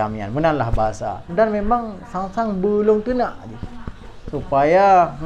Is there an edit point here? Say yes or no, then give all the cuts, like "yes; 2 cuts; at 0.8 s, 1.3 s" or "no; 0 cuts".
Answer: yes; 1 cut; at 1.2 s